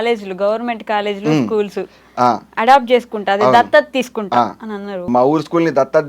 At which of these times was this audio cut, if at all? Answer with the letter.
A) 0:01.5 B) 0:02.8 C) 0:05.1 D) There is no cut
C